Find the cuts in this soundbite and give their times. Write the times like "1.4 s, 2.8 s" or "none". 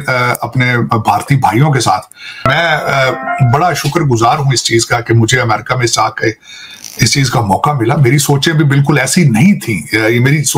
2.4 s

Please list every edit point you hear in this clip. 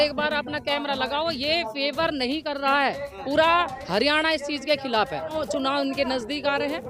5.4 s

